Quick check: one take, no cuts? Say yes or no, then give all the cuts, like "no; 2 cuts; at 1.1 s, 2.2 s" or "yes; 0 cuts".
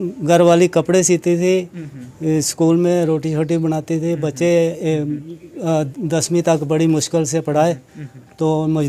yes; 0 cuts